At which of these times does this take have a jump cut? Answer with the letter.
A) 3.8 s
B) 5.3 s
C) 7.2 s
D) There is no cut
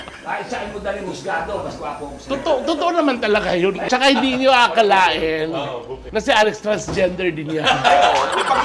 A